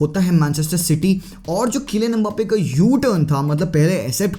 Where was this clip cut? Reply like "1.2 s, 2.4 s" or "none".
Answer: none